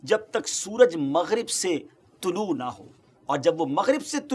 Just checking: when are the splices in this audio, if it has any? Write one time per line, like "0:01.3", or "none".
none